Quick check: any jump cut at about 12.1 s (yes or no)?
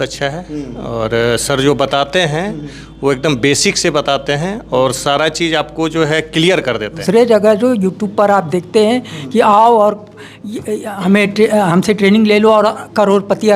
no